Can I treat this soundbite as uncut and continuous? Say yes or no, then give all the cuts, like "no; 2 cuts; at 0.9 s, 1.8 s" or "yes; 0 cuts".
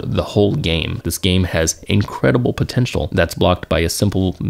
no; 2 cuts; at 1.0 s, 3.1 s